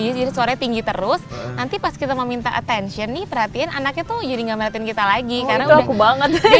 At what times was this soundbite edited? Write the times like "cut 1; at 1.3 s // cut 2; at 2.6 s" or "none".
none